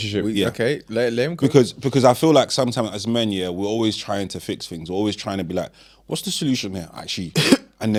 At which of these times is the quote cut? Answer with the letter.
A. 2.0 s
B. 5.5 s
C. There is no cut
C